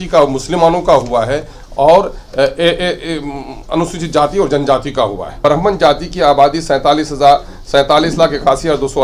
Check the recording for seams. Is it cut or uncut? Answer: cut